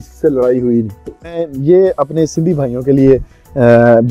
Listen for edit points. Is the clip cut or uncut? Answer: cut